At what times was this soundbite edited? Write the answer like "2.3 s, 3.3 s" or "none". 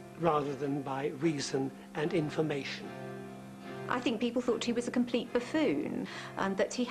1.6 s